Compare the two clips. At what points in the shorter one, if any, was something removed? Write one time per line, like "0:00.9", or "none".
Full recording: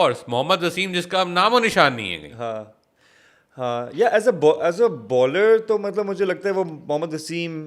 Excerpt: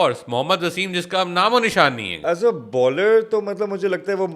0:02.2